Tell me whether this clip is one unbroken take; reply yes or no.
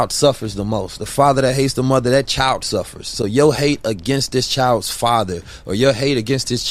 yes